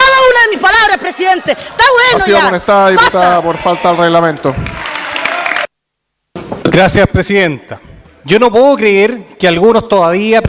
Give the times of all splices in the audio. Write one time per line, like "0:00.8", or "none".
none